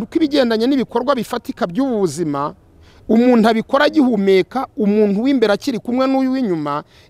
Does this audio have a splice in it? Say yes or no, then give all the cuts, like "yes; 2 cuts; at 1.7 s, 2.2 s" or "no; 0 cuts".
no; 0 cuts